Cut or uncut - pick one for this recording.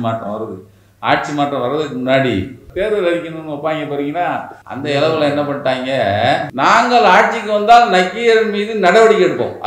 cut